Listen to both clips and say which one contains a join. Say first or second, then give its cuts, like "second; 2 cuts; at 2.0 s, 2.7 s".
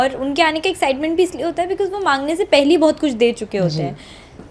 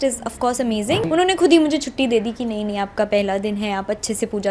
second; 1 cut; at 1.0 s